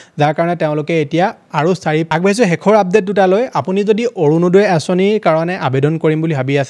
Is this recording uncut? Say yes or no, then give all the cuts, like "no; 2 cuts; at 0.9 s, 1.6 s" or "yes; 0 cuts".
no; 1 cut; at 2.1 s